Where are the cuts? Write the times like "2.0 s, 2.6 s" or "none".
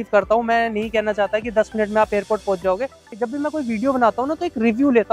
3.2 s